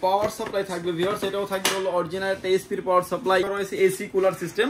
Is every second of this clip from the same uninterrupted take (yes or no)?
no